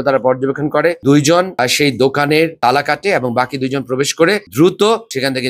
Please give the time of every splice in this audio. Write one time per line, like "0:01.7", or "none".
0:01.5
0:04.4